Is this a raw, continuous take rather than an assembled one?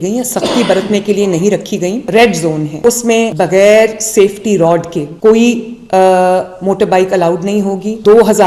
no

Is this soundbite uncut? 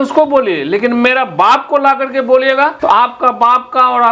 no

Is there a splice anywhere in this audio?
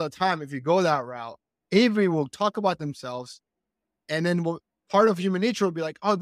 no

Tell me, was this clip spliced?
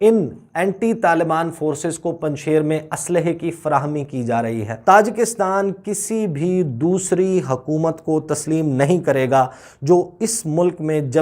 yes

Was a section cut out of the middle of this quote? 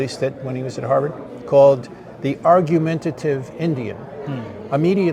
no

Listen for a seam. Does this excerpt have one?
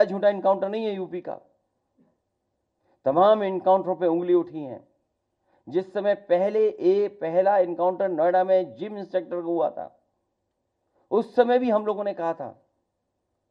no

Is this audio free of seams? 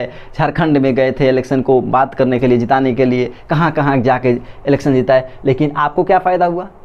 yes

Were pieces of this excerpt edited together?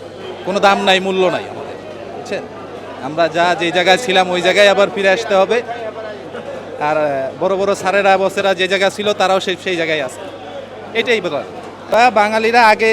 no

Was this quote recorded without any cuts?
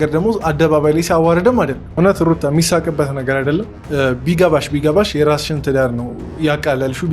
no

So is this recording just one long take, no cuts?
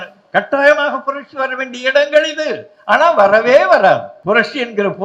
no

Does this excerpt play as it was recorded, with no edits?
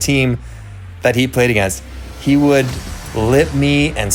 yes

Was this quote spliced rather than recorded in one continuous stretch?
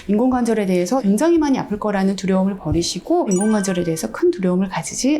yes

